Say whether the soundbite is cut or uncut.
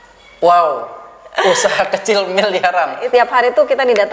cut